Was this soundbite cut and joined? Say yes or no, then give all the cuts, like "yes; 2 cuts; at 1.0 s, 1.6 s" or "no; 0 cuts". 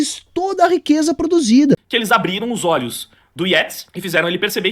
yes; 1 cut; at 1.9 s